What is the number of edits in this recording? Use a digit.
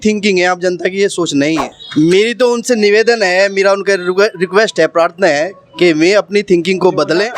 0